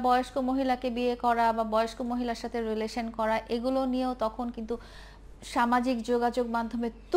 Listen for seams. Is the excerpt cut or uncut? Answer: uncut